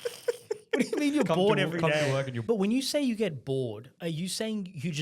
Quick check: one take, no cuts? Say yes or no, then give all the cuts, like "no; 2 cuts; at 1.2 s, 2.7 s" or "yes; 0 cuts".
no; 2 cuts; at 2.3 s, 3.9 s